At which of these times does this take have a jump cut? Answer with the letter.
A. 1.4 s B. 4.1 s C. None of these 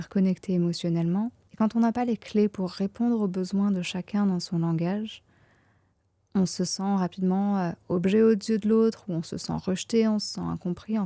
A